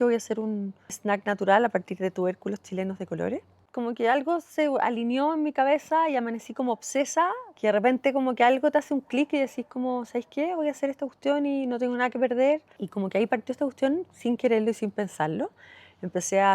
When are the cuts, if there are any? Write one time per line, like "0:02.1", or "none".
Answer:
0:01.0
0:03.6
0:07.5
0:12.8